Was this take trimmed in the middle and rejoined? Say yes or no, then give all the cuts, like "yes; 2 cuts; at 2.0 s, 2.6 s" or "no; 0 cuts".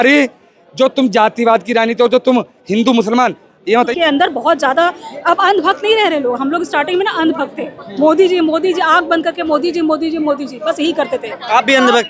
yes; 1 cut; at 3.9 s